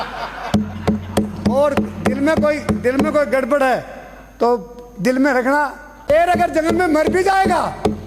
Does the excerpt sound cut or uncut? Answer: cut